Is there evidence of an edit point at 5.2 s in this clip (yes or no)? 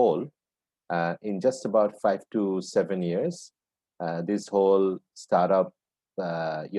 no